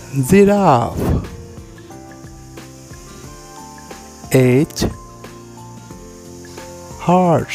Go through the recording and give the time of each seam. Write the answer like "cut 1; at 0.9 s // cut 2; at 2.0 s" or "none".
none